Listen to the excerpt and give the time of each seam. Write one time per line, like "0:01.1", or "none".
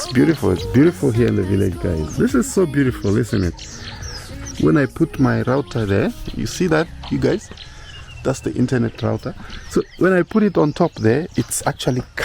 0:02.1
0:04.4